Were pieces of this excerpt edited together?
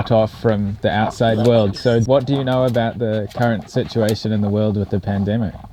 no; 0 cuts

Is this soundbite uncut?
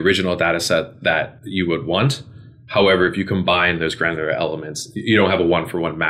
no; 1 cut; at 1.4 s

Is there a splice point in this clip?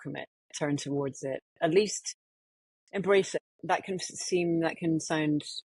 yes; 1 cut; at 3.3 s

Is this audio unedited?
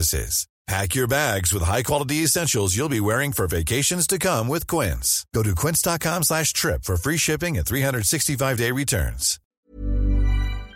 no; 1 cut; at 9.6 s

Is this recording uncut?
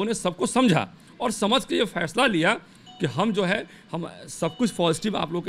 yes; 0 cuts

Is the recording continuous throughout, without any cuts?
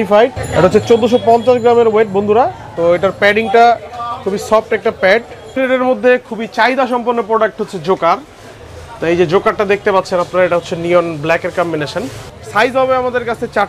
no; 2 cuts; at 5.6 s, 12.3 s

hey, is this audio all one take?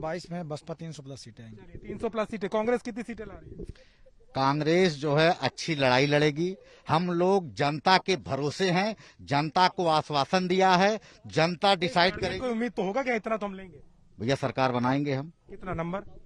yes; 0 cuts

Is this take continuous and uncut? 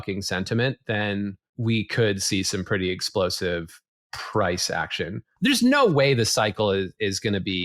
no; 2 cuts; at 1.5 s, 5.2 s

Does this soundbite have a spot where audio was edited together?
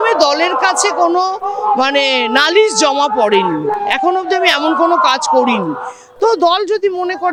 no; 0 cuts

